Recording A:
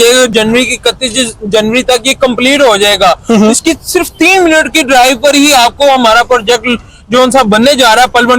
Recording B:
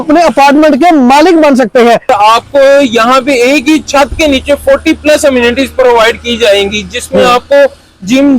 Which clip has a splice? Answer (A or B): B